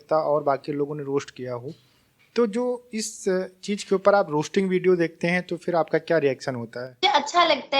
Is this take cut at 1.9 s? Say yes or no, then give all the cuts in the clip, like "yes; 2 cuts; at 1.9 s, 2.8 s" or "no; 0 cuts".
no; 0 cuts